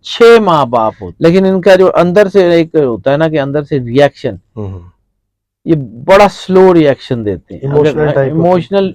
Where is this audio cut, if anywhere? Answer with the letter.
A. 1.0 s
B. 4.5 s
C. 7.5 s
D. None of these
A